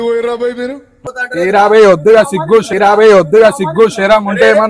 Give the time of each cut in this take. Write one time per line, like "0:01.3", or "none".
0:00.9